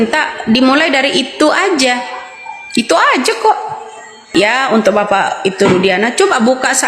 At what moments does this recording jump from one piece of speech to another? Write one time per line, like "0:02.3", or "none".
0:04.2